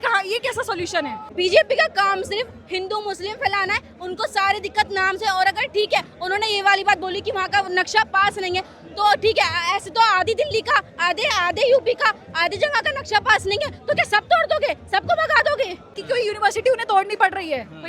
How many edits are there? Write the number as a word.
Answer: two